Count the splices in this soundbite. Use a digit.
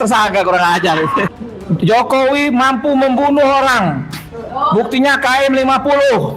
1